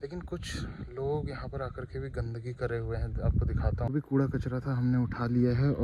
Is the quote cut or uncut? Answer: cut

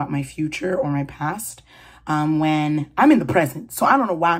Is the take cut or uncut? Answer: uncut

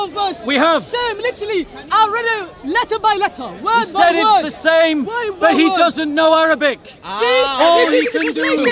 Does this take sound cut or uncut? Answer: uncut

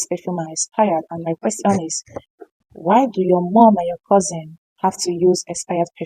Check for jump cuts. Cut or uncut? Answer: uncut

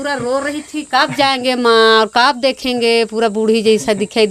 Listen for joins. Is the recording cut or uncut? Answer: uncut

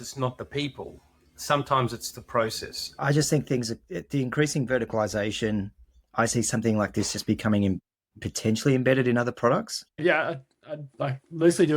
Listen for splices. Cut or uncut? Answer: cut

